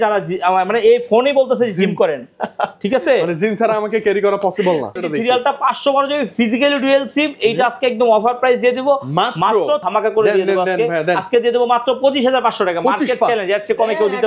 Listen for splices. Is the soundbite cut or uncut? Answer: cut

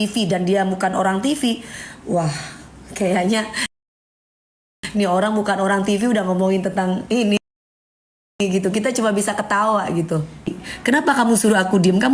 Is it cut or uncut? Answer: cut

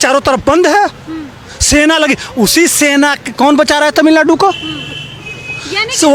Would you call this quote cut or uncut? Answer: uncut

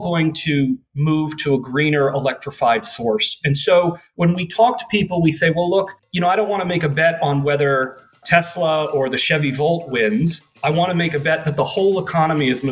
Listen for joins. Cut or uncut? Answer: cut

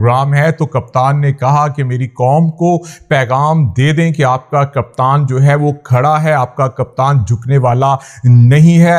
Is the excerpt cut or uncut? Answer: uncut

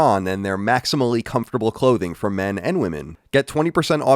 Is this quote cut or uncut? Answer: cut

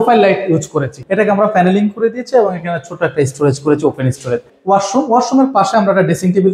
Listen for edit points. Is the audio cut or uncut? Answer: cut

